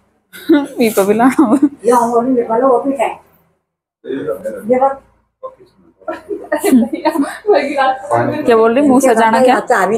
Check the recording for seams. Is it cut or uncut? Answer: cut